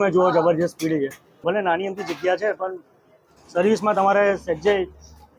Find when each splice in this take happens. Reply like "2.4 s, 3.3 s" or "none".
1.4 s